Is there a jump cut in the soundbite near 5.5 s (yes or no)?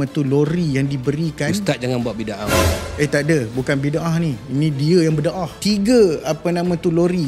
yes